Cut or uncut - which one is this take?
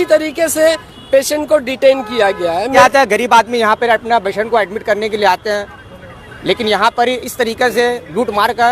cut